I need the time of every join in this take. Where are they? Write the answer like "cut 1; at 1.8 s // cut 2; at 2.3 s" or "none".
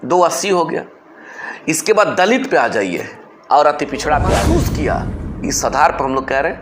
cut 1; at 4.4 s